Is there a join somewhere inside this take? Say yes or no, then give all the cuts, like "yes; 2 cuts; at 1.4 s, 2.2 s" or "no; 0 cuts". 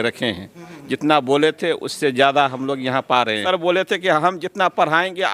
yes; 1 cut; at 3.4 s